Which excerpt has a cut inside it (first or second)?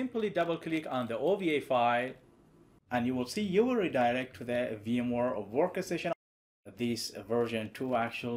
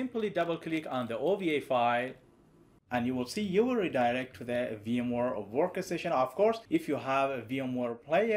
first